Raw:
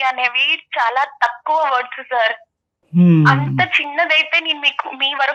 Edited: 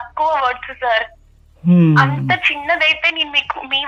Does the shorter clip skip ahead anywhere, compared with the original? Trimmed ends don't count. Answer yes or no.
no